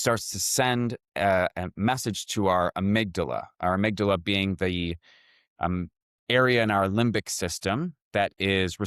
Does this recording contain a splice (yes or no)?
no